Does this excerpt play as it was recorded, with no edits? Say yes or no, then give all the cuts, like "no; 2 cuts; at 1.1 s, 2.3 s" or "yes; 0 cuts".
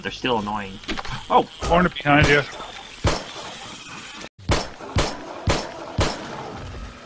no; 1 cut; at 4.2 s